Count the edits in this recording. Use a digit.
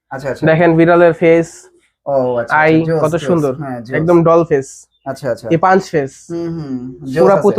0